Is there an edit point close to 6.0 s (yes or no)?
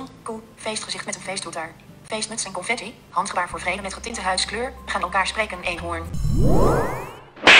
yes